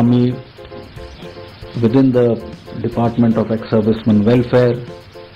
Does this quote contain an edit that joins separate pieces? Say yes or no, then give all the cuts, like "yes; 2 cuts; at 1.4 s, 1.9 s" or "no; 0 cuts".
no; 0 cuts